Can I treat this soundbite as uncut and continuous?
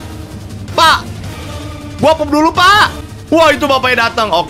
no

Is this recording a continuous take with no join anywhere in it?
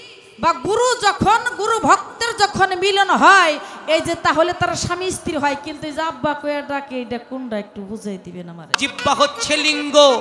no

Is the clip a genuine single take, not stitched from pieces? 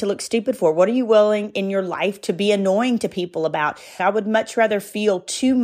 no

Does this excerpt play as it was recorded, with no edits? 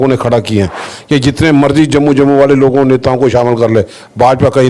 no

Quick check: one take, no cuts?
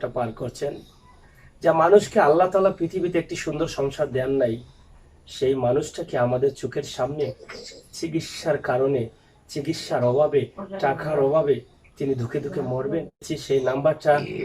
no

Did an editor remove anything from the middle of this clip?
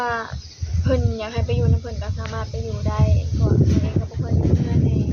no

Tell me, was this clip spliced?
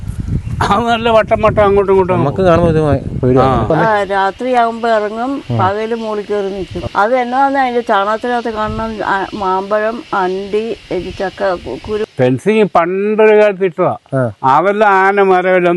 yes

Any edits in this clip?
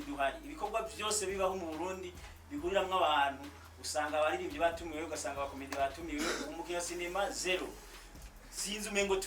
no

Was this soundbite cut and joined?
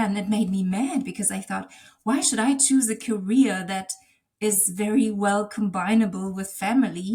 no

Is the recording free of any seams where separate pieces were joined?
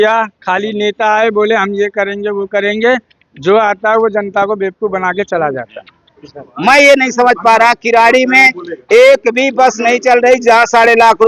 no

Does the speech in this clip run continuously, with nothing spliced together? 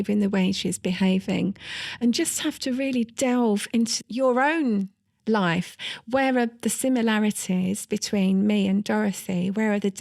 no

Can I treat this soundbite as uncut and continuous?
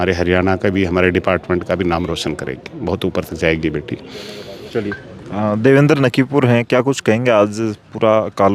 yes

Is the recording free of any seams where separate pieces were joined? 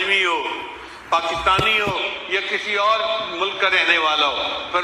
yes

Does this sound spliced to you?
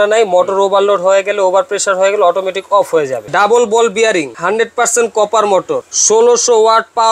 yes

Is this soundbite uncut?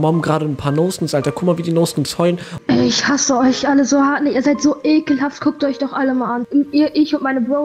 no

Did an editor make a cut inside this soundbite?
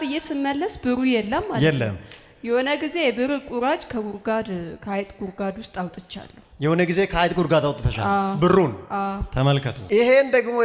no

